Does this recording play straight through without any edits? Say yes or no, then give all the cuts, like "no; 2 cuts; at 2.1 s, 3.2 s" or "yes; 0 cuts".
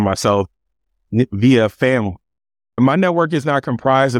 no; 1 cut; at 2.8 s